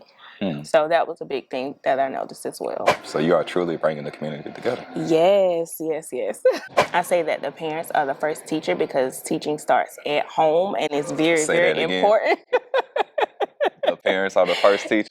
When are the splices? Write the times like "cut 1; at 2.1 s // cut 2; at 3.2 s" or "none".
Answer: cut 1; at 3.0 s // cut 2; at 6.7 s